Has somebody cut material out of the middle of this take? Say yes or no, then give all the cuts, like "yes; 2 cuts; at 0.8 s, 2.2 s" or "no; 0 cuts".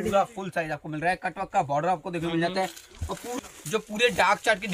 yes; 1 cut; at 3.3 s